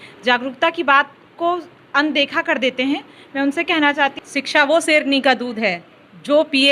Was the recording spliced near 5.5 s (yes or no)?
no